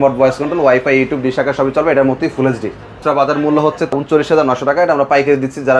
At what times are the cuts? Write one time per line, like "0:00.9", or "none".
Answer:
0:02.9
0:03.9